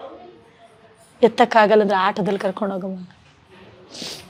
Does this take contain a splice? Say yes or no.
no